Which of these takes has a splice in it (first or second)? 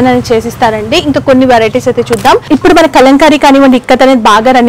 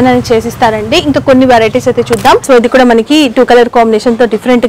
second